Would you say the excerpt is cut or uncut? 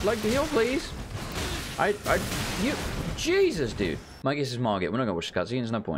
cut